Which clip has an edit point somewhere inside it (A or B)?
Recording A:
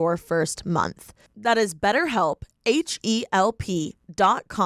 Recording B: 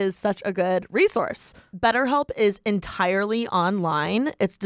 B